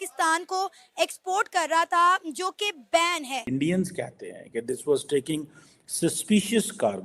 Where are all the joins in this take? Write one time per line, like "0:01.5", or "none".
0:03.4